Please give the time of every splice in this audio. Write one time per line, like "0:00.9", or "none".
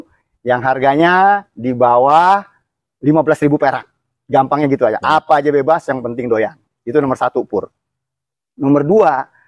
none